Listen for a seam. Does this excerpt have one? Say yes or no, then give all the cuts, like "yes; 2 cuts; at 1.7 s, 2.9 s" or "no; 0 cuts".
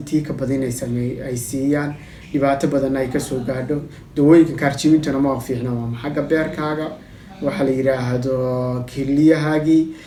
no; 0 cuts